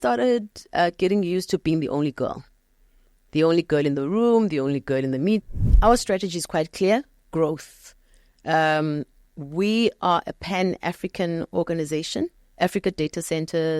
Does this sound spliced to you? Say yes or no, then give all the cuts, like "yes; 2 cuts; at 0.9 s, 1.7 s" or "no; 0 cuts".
yes; 1 cut; at 5.4 s